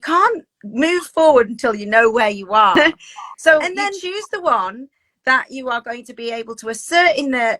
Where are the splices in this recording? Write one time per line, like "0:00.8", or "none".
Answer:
0:02.8